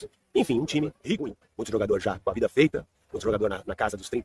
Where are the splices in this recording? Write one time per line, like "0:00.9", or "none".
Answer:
0:01.0